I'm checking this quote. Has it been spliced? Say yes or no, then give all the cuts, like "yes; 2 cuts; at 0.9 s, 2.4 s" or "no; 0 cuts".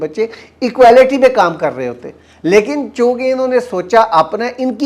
no; 0 cuts